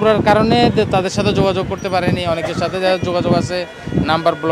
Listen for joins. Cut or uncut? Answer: uncut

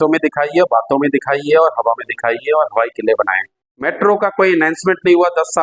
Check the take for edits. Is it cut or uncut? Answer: cut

